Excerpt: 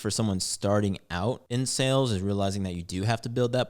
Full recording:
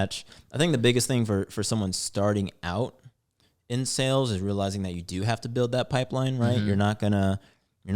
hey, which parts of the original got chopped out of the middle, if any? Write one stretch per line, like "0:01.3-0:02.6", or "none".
0:03.0-0:03.6